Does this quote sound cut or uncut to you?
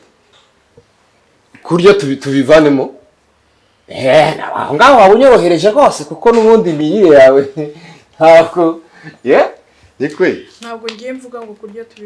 uncut